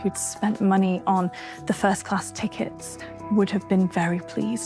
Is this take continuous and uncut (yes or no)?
yes